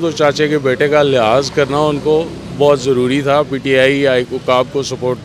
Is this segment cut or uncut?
uncut